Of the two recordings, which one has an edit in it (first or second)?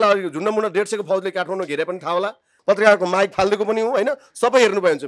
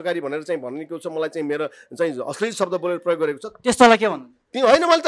first